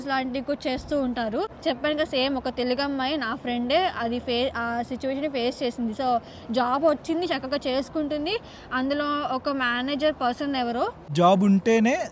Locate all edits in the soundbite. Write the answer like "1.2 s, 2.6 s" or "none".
1.5 s, 11.0 s